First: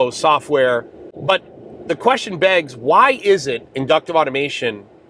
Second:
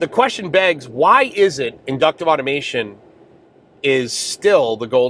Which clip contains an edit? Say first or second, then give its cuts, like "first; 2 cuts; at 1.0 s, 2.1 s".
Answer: first; 1 cut; at 0.9 s